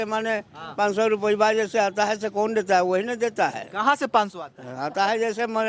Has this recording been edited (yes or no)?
no